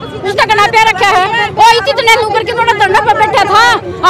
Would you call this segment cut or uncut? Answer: uncut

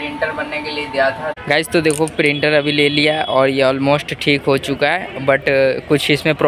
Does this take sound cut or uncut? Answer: cut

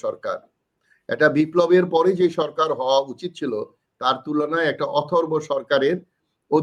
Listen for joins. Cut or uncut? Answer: uncut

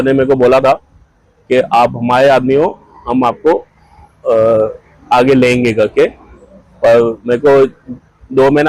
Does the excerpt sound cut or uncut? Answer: uncut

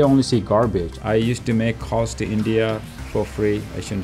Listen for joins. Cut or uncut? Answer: cut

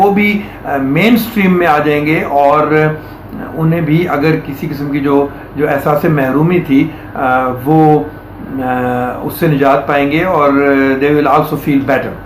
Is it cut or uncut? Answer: uncut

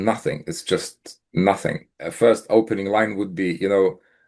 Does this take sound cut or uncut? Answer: cut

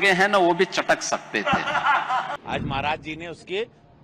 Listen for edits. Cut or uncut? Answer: cut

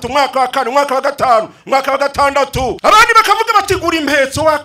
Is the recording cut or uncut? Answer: cut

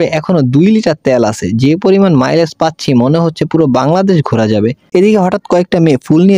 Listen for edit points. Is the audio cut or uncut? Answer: cut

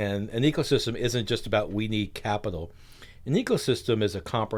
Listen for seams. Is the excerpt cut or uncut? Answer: uncut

